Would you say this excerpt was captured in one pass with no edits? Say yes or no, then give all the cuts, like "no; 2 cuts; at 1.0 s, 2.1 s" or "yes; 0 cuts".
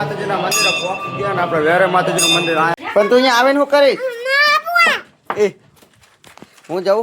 no; 1 cut; at 2.8 s